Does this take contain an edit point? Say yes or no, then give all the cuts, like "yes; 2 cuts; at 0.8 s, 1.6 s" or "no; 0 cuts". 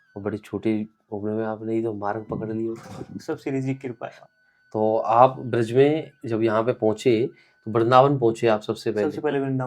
yes; 1 cut; at 4.1 s